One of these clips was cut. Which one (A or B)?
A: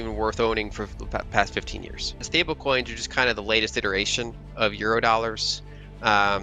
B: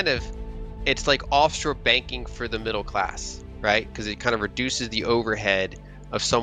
A